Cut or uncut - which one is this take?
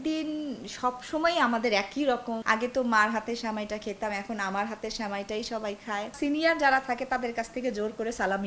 cut